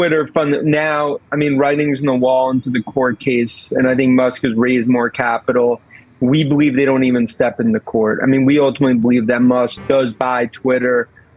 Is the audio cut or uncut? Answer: uncut